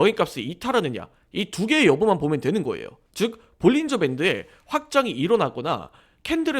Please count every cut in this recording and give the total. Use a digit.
1